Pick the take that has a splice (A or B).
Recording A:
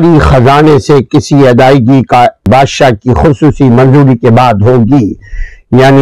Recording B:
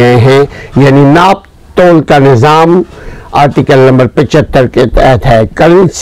A